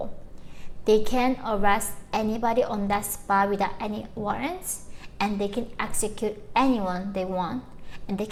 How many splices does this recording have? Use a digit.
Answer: 0